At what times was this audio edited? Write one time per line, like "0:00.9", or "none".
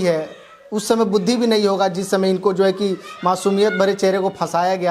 none